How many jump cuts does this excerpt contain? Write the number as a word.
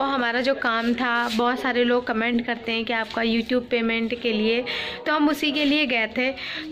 zero